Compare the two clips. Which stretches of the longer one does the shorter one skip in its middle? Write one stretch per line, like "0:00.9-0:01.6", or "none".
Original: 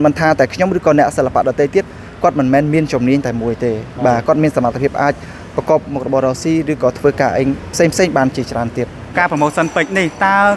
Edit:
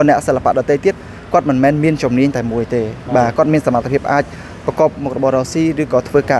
none